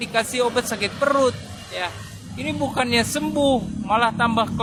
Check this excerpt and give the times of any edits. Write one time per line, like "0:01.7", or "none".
none